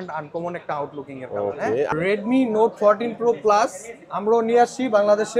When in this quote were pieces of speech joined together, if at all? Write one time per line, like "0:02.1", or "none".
0:01.9